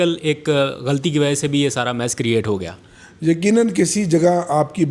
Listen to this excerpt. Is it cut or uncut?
uncut